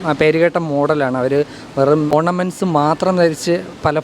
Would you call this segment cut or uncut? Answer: cut